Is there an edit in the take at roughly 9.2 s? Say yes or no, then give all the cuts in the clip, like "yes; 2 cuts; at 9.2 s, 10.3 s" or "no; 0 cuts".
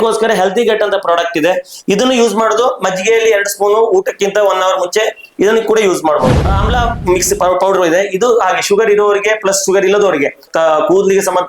no; 2 cuts; at 6.3 s, 10.5 s